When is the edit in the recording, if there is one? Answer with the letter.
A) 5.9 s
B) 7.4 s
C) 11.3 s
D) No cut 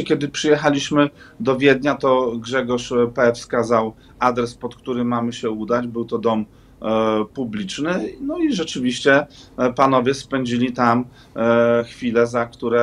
D